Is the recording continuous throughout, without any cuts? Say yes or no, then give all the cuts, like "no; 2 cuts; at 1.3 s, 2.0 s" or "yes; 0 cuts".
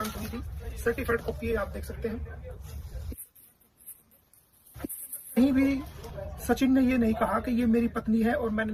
yes; 0 cuts